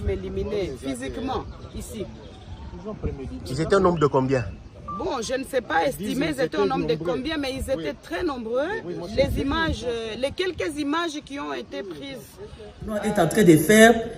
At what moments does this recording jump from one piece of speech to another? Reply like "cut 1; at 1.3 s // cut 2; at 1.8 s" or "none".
cut 1; at 13.1 s